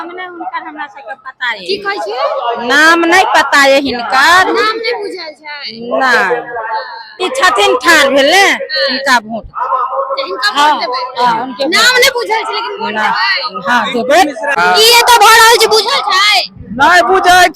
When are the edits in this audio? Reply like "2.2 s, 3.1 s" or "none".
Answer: 7.2 s, 14.5 s